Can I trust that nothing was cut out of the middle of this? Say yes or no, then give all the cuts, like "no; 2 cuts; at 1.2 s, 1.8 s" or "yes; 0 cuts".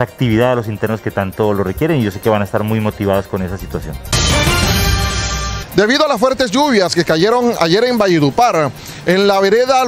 no; 2 cuts; at 4.1 s, 5.5 s